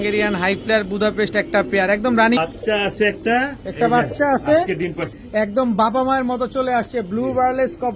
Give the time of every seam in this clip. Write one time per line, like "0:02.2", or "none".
0:02.4
0:05.2